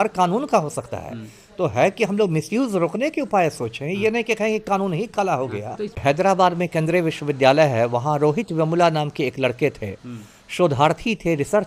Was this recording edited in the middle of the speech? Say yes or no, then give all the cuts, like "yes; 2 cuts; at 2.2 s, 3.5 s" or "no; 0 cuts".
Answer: yes; 1 cut; at 5.8 s